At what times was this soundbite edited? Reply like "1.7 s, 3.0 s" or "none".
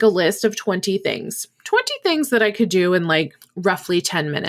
3.4 s